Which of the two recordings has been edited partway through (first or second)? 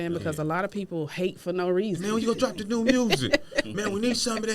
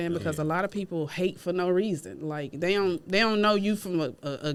first